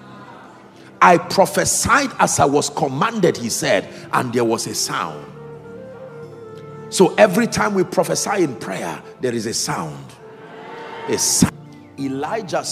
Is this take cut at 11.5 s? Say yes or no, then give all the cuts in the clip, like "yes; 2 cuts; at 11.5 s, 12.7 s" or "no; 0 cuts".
yes; 1 cut; at 11.5 s